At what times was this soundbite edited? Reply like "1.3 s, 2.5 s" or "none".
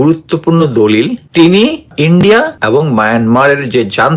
1.2 s, 1.9 s, 2.6 s